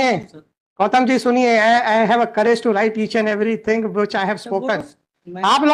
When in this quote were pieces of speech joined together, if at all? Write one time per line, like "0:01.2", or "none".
none